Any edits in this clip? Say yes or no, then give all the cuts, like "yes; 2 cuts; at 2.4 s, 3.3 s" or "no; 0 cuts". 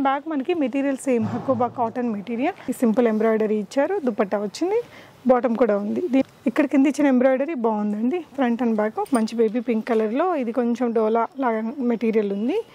yes; 3 cuts; at 2.6 s, 6.2 s, 9.1 s